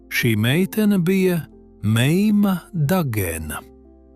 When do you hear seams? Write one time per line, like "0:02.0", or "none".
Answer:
none